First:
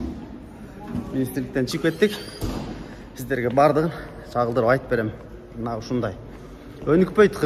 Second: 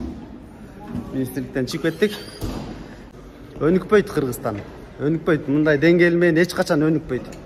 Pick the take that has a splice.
second; 1 cut; at 3.1 s

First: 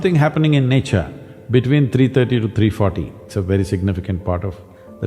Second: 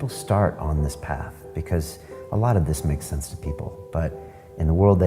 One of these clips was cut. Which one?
first; 1 cut; at 3.2 s

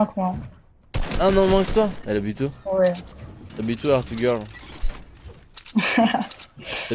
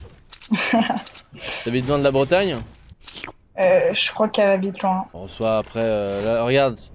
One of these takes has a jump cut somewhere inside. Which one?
first; 1 cut; at 3.5 s

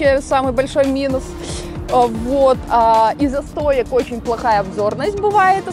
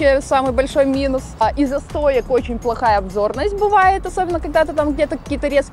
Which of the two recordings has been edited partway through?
second; 1 cut; at 1.4 s

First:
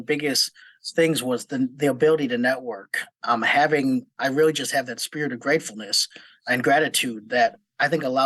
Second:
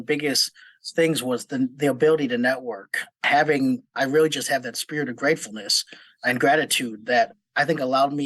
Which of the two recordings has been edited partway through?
second; 1 cut; at 3.2 s

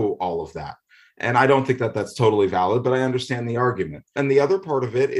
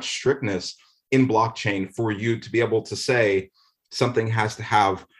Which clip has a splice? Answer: first; 1 cut; at 4.1 s

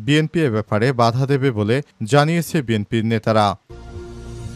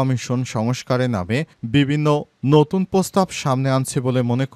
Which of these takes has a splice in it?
first; 1 cut; at 3.6 s

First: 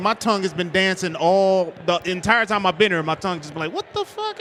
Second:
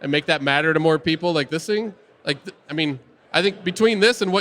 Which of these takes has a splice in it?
second; 1 cut; at 3.1 s

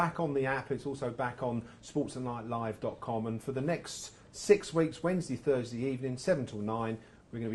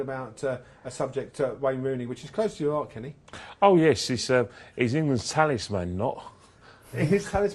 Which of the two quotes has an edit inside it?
second; 1 cut; at 3.0 s

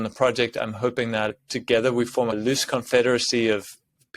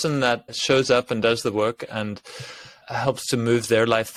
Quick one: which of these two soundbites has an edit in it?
first; 2 cuts; at 1.4 s, 2.3 s

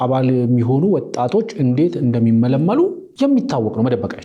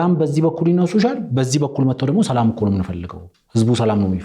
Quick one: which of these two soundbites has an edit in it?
first; 1 cut; at 3.0 s

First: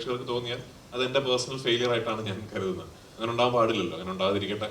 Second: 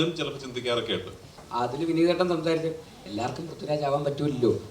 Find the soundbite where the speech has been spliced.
second; 1 cut; at 1.4 s

